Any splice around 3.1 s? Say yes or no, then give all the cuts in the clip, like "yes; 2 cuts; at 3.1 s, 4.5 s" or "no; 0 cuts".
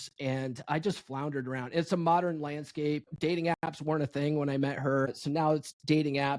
yes; 2 cuts; at 3.1 s, 5.2 s